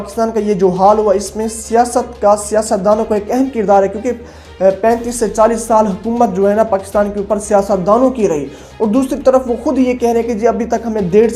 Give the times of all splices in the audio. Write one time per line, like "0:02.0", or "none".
none